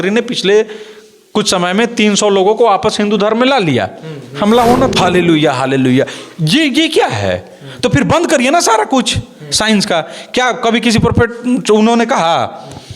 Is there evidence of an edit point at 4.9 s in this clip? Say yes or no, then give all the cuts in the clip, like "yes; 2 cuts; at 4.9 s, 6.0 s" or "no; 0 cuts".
yes; 1 cut; at 4.9 s